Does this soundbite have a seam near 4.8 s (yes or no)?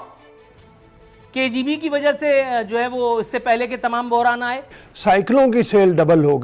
yes